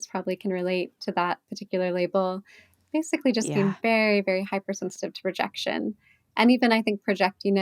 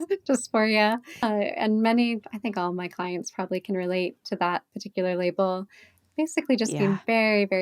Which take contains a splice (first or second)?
second